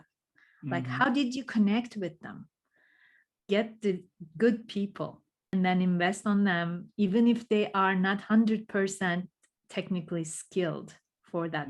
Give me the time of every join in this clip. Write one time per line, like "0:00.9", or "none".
0:03.5
0:05.5